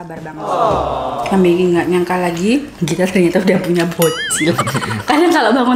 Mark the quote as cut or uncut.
cut